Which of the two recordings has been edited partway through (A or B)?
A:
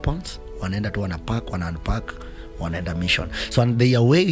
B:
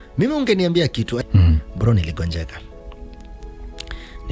B